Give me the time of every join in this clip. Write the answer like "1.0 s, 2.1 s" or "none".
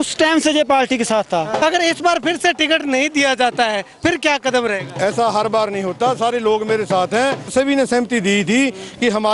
1.6 s, 7.5 s